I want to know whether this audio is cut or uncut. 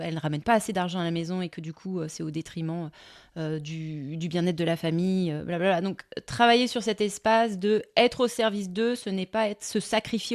uncut